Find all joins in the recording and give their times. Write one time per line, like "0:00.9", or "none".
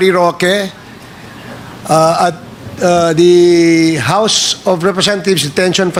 none